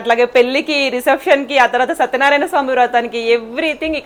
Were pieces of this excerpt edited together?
no; 0 cuts

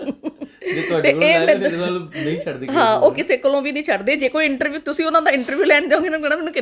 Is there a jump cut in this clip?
no; 0 cuts

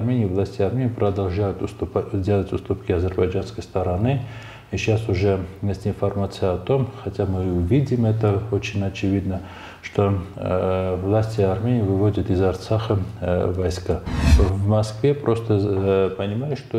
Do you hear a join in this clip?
yes; 1 cut; at 14.2 s

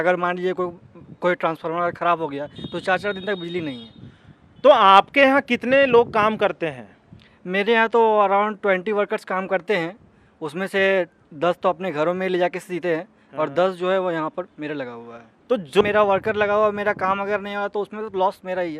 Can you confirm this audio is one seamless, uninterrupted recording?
no; 1 cut; at 15.8 s

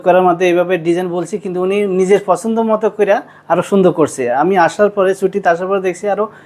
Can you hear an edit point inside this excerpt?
no; 0 cuts

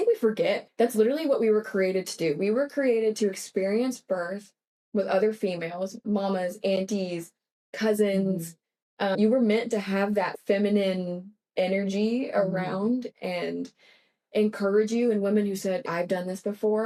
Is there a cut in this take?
no; 0 cuts

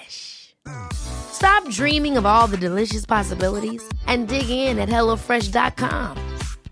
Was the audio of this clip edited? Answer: no; 0 cuts

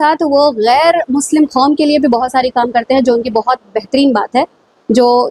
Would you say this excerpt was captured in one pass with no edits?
yes; 0 cuts

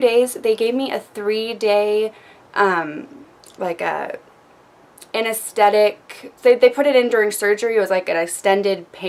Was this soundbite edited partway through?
no; 0 cuts

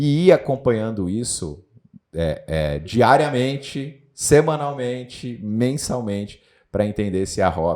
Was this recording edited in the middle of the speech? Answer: no; 0 cuts

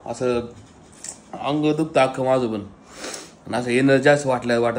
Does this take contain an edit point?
no; 0 cuts

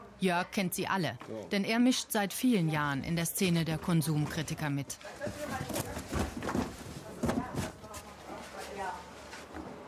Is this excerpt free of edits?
no; 1 cut; at 7.9 s

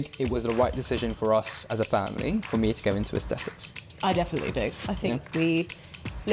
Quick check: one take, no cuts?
yes; 0 cuts

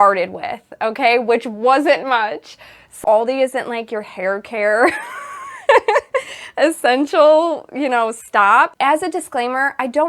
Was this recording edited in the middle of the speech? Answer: yes; 2 cuts; at 3.0 s, 8.7 s

